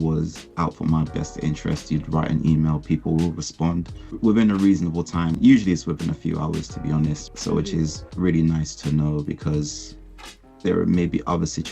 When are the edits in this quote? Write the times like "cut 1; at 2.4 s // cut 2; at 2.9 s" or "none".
cut 1; at 4.2 s // cut 2; at 5.3 s // cut 3; at 7.2 s